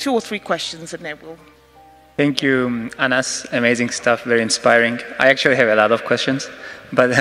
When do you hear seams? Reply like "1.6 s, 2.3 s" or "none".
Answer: none